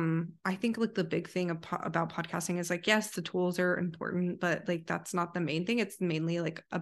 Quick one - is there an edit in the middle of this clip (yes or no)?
no